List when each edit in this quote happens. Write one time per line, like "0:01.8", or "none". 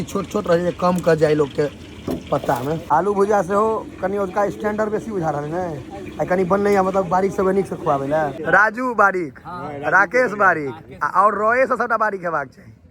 0:02.8
0:08.4